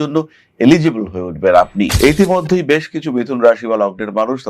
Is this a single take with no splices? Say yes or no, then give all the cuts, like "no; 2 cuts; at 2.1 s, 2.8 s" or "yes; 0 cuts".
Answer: no; 1 cut; at 1.9 s